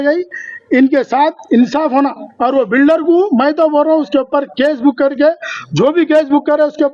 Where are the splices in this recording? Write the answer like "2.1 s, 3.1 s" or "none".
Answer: none